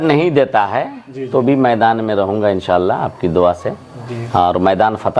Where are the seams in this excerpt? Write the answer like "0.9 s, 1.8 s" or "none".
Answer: none